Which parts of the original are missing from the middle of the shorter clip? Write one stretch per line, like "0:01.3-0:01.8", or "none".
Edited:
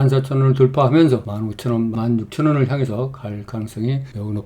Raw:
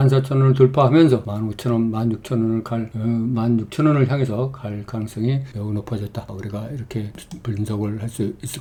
0:01.9-0:03.3